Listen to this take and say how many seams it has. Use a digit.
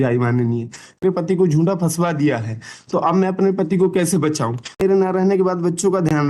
2